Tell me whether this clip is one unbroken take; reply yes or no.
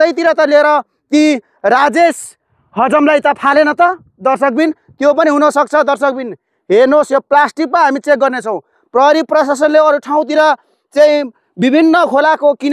yes